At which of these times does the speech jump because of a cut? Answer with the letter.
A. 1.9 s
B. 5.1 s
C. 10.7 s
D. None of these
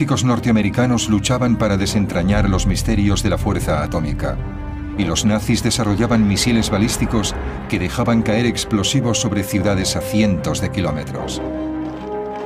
C